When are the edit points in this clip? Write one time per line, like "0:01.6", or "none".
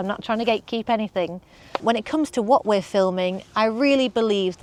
none